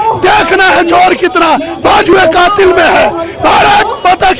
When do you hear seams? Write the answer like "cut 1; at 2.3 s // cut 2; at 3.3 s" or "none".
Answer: none